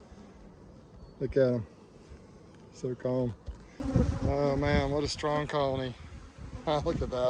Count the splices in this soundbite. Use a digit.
1